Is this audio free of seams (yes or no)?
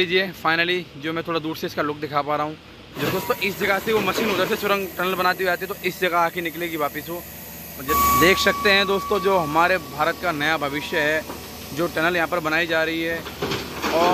no